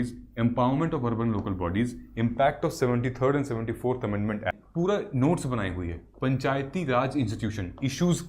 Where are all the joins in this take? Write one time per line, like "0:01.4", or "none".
0:04.5